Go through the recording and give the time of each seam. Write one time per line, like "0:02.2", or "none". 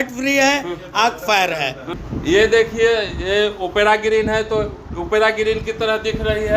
0:01.8

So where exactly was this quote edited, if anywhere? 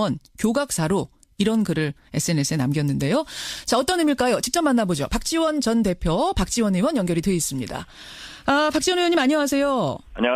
0:08.7

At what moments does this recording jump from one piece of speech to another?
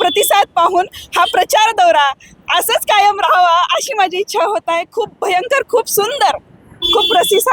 none

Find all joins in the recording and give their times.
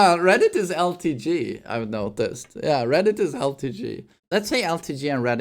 0:04.2

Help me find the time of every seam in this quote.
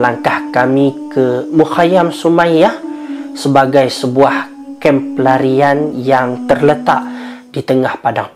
none

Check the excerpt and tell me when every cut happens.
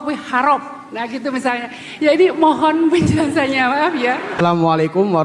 0:04.3

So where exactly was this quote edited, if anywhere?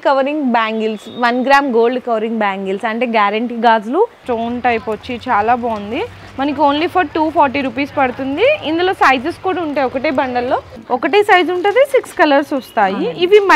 0:04.2
0:10.7

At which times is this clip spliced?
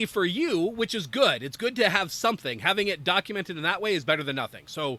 none

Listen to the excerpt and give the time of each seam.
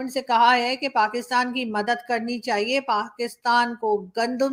none

